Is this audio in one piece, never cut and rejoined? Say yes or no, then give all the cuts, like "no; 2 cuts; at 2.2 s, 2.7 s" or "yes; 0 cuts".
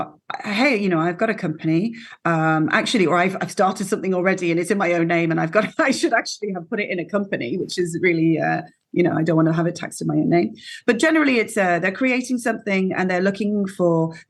yes; 0 cuts